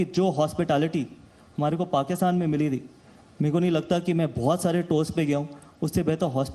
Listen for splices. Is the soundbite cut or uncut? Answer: uncut